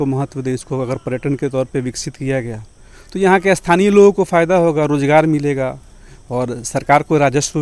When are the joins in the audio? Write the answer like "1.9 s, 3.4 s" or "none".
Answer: none